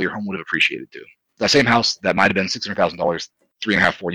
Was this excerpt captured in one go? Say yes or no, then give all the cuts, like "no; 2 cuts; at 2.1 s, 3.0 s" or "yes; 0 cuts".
no; 1 cut; at 1.2 s